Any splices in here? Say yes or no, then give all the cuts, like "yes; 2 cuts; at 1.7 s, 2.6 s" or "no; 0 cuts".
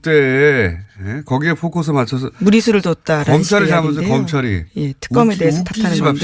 no; 0 cuts